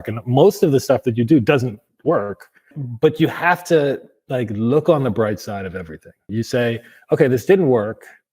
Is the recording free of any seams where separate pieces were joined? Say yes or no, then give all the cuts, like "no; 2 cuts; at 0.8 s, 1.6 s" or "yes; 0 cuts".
no; 2 cuts; at 2.8 s, 6.3 s